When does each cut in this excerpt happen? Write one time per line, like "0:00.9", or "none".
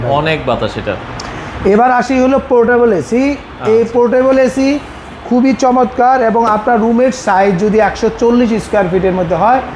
none